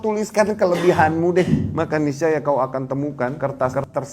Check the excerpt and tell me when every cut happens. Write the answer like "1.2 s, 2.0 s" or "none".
1.7 s, 3.4 s